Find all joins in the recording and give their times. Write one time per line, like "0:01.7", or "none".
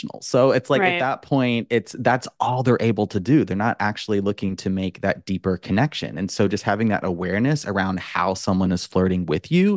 none